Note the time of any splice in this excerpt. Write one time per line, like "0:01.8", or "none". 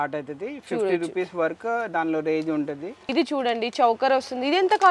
none